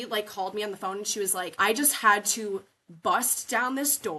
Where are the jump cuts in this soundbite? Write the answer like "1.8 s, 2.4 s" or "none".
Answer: 1.5 s

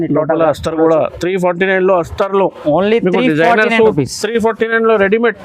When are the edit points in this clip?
none

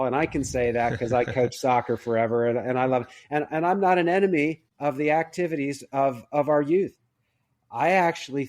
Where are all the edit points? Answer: 4.7 s

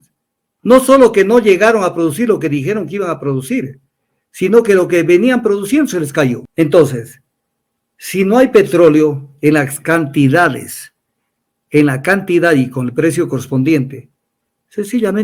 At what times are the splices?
6.4 s

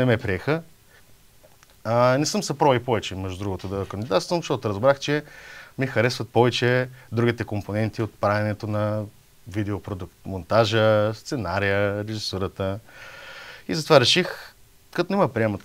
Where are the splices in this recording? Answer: none

